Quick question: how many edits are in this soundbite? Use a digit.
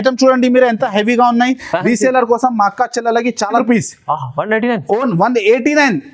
1